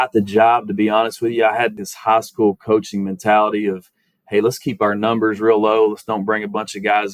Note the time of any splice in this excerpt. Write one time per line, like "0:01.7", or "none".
0:01.9